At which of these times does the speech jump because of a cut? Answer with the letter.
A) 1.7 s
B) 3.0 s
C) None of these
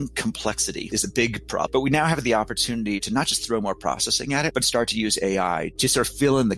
A